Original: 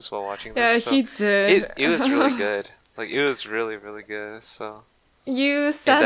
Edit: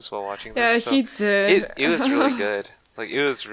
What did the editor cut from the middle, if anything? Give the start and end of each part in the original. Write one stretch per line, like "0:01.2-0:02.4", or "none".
none

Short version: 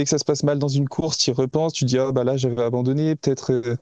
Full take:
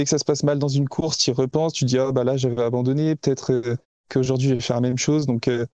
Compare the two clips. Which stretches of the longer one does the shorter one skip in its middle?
none

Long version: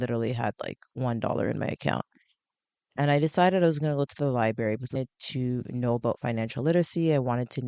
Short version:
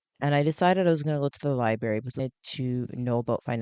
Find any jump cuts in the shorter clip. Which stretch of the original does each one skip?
none

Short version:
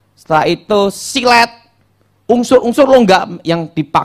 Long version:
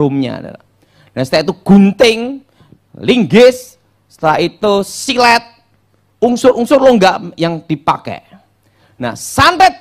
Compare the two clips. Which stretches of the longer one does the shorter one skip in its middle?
none

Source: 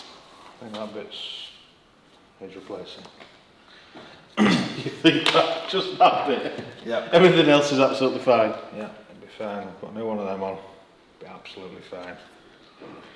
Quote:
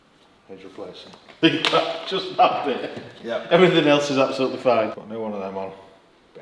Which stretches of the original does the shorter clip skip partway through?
0:03.2-0:04.9
0:08.6-0:09.8

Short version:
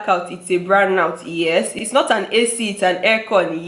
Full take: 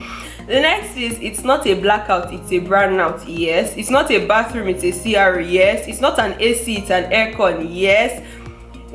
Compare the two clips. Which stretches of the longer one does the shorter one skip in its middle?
0:03.8-0:05.8

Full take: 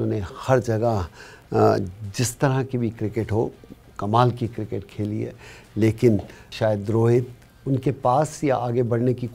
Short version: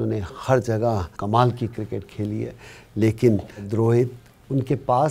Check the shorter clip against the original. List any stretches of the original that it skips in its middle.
0:01.1-0:03.9
0:06.5-0:06.8

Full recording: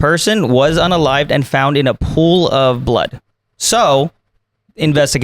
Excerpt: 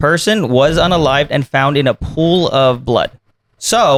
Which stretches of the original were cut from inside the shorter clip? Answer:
none

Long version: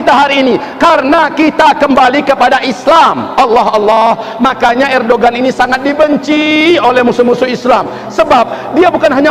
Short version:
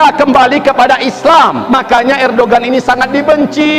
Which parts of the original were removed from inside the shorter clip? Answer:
0:03.2-0:04.3

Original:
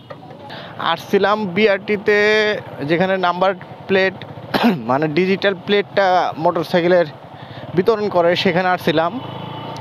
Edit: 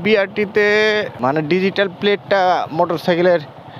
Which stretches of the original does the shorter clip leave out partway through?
0:02.7-0:04.8

